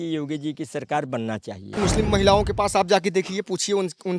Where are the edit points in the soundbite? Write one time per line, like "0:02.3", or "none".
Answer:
0:01.8